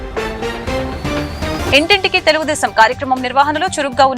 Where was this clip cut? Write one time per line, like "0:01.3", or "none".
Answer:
0:01.5